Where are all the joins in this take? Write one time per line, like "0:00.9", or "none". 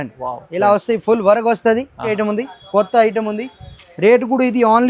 0:02.1